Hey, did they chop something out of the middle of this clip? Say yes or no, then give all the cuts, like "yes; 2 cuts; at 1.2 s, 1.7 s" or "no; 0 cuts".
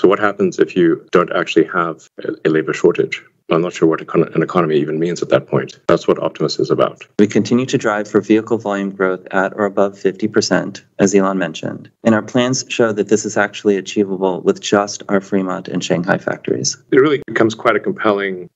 yes; 2 cuts; at 7.0 s, 16.8 s